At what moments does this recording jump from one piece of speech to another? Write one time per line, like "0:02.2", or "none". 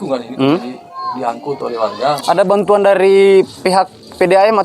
0:02.2